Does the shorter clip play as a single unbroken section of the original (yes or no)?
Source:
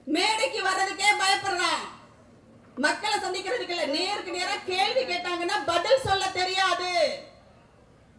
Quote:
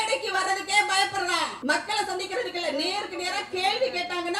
no